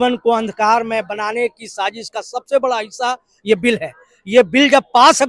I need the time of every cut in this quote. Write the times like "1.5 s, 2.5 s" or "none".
none